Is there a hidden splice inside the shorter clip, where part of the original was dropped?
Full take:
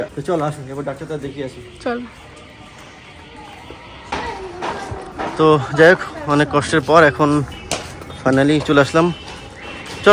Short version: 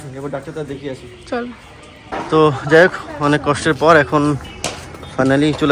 yes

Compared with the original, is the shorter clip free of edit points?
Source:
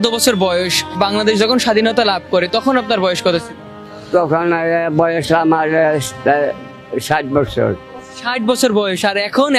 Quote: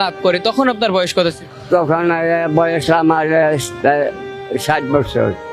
no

